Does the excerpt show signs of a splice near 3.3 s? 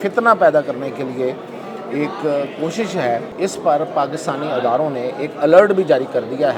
yes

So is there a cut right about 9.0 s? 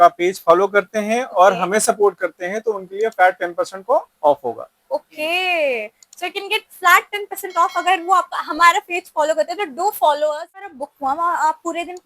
no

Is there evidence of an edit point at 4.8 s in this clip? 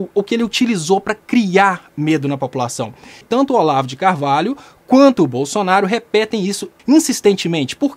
no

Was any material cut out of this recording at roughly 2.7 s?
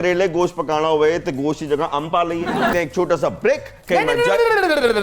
yes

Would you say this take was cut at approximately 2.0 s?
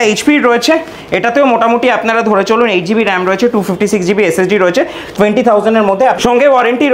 no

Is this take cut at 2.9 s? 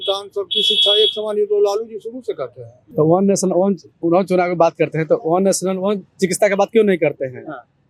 yes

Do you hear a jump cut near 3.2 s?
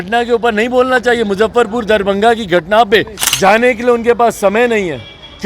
yes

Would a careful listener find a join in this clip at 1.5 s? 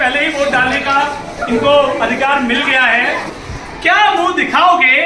no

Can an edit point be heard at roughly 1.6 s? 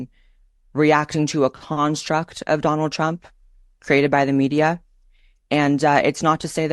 yes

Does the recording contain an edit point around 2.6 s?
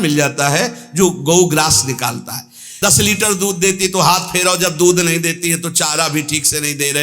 yes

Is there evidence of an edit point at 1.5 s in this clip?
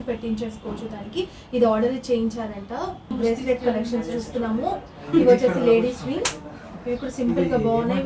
no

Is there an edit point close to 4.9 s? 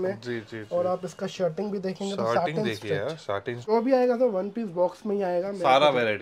no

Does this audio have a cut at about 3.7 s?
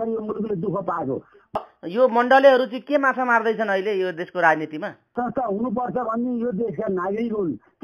no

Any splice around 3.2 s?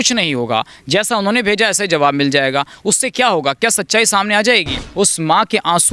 no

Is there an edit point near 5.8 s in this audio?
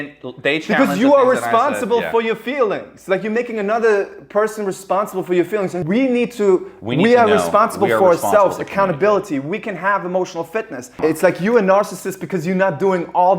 yes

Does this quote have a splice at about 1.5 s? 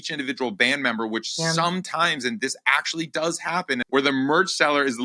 no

